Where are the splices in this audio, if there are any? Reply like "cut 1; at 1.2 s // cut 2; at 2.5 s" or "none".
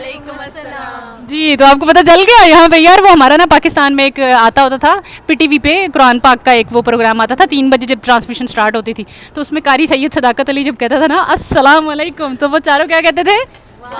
none